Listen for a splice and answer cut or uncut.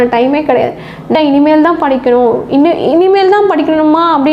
cut